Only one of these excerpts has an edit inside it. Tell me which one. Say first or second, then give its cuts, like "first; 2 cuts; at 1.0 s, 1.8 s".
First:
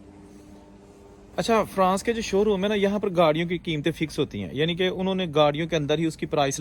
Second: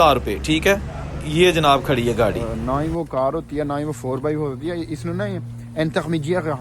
second; 1 cut; at 2.5 s